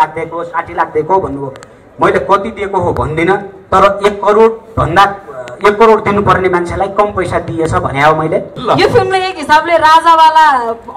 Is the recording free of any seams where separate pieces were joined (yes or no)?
no